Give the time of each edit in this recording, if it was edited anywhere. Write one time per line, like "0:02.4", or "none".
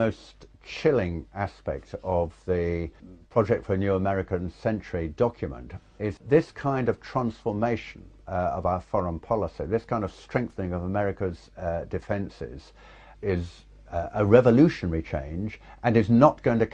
0:08.0